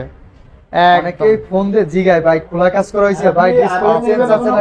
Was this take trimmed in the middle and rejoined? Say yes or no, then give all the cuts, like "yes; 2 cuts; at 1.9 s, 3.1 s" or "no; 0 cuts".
no; 0 cuts